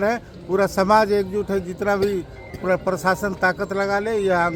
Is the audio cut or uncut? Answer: uncut